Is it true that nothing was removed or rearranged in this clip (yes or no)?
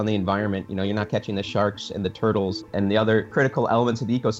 no